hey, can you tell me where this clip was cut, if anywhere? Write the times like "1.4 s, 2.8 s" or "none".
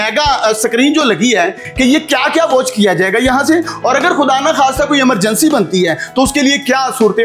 1.6 s